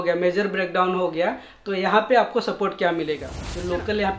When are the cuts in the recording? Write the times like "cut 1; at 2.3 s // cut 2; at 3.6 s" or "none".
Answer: cut 1; at 3.3 s